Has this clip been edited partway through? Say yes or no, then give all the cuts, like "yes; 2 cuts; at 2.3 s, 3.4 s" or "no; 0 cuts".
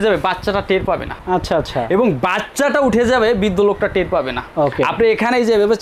yes; 2 cuts; at 1.1 s, 4.4 s